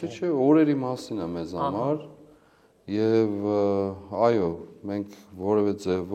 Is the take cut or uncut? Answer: uncut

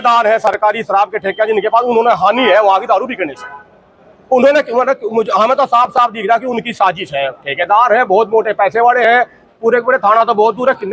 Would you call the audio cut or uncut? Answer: uncut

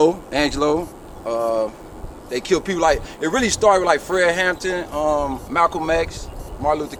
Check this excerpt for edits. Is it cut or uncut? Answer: uncut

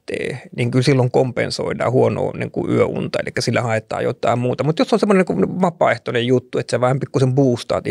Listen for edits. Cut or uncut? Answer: uncut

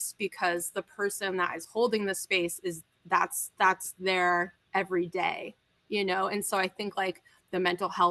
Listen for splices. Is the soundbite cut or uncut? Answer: uncut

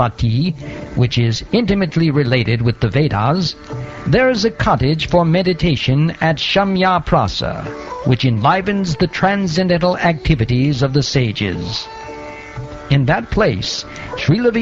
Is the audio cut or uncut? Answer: cut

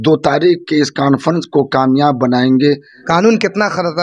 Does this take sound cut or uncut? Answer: cut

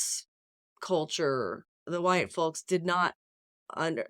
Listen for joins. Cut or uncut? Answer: cut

